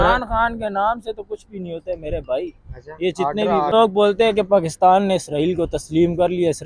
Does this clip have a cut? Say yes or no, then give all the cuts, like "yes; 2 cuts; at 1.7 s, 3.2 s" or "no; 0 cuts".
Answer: yes; 1 cut; at 3.7 s